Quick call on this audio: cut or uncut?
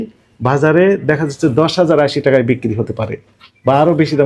uncut